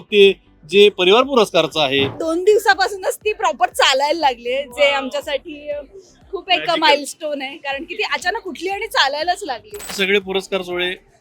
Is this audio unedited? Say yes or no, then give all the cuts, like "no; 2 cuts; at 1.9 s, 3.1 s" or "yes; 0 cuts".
no; 2 cuts; at 2.2 s, 9.9 s